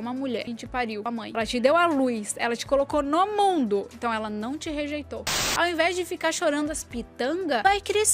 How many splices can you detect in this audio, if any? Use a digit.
2